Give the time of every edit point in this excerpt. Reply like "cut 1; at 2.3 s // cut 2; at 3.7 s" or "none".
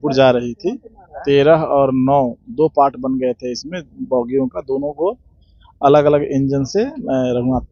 none